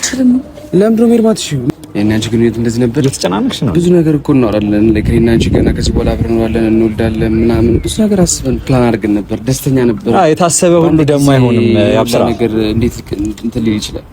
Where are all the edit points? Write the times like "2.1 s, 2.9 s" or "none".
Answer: 1.7 s